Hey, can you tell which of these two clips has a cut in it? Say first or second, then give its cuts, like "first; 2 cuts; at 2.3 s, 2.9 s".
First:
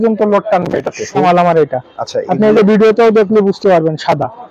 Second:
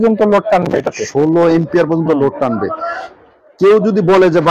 first; 1 cut; at 1.2 s